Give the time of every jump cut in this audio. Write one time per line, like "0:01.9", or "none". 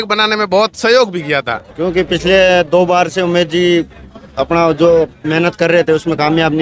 0:01.6